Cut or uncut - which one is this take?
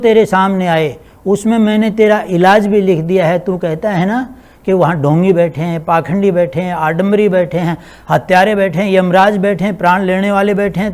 uncut